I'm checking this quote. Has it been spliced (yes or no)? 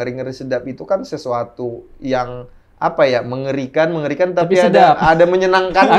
no